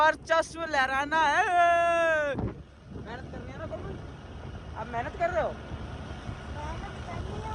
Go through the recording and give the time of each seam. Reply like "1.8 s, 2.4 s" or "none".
none